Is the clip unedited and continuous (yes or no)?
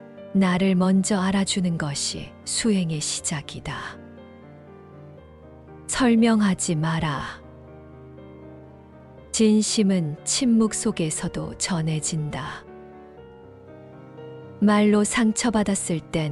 no